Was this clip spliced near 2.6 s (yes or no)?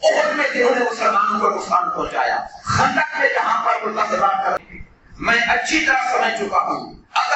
no